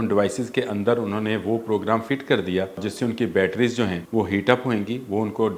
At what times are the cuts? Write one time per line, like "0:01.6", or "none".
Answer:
0:02.9
0:04.0